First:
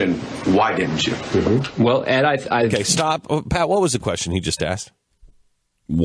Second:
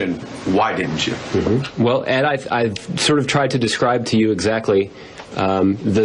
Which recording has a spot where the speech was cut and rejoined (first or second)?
second